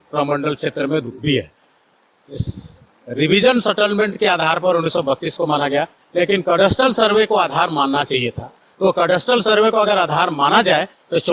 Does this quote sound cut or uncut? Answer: uncut